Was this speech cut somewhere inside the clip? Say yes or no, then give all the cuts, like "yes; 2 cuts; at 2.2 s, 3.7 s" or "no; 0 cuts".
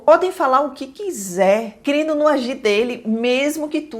yes; 1 cut; at 1.8 s